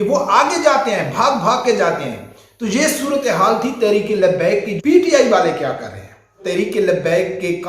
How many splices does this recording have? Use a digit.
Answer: 2